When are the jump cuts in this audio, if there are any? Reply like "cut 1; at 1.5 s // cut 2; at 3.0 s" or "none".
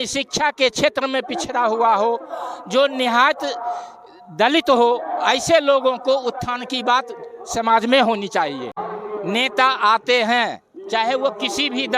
cut 1; at 8.8 s